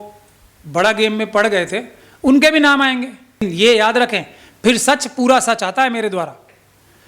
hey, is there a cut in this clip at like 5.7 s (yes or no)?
no